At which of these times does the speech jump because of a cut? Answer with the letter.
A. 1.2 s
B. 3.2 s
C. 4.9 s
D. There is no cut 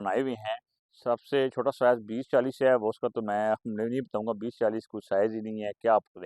D